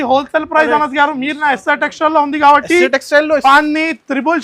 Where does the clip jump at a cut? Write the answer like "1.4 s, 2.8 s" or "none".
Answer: 3.4 s